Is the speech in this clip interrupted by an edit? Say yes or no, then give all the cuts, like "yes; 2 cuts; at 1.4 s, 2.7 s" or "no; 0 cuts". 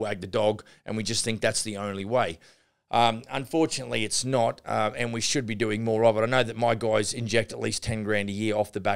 yes; 1 cut; at 7.5 s